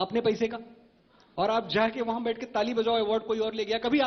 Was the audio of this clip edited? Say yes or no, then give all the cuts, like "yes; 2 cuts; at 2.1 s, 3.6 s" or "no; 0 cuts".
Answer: no; 0 cuts